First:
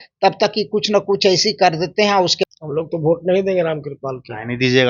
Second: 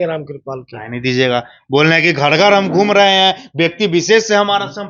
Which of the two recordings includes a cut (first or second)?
first